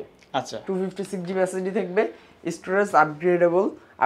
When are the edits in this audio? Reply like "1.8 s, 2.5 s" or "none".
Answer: none